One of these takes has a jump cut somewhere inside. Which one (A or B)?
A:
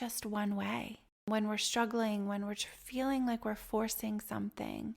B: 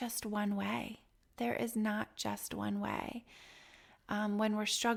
A